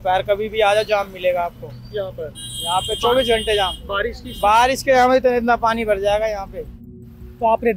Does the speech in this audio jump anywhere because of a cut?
no; 0 cuts

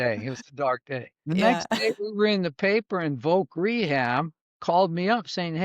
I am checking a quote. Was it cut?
yes; 1 cut; at 1.1 s

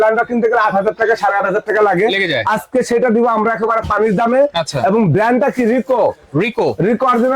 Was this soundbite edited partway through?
no; 0 cuts

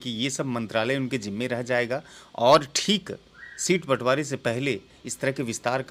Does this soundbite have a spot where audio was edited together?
no; 0 cuts

